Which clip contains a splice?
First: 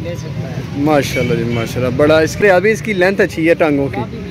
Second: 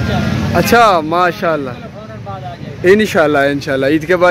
first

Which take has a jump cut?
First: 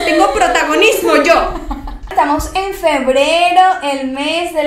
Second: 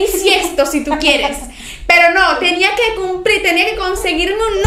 first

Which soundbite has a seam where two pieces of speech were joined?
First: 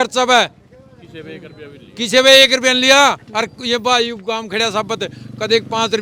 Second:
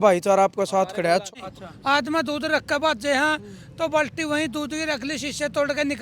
second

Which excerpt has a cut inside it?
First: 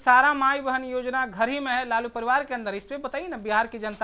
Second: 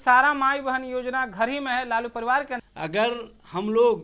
second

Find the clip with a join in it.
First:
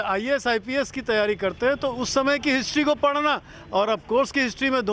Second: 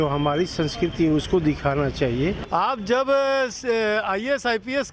second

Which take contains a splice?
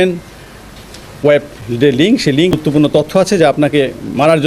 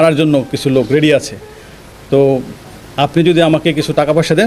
first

